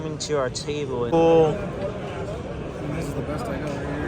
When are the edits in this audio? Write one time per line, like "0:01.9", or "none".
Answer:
0:01.1